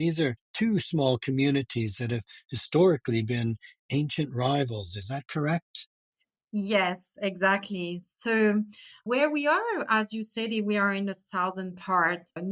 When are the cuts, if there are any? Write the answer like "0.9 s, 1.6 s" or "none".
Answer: none